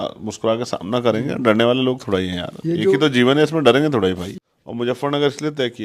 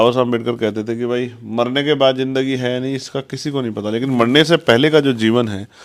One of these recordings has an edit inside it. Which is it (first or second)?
first